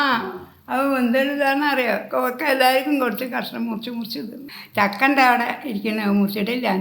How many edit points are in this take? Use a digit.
0